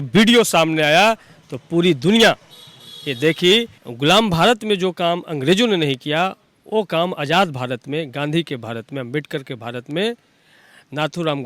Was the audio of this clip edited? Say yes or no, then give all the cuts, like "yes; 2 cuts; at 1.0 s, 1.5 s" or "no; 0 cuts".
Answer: yes; 1 cut; at 3.8 s